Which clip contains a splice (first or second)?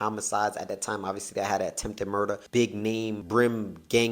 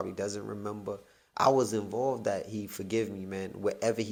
first